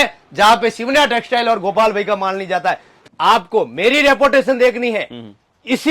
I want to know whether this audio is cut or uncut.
cut